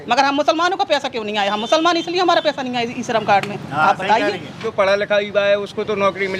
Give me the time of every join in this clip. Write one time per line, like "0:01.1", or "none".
0:04.7

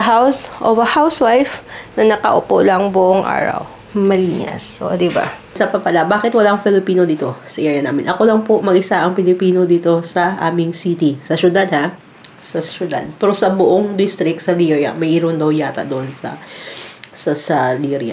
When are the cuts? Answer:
0:05.6

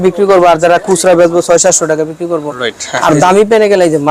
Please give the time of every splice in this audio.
none

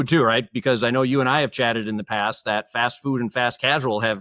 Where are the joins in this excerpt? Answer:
none

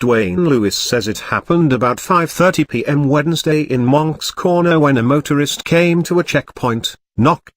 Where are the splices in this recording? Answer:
0:00.8
0:06.5

